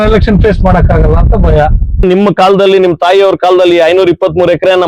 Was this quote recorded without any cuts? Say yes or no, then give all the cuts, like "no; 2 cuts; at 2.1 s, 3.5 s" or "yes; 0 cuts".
no; 1 cut; at 2.0 s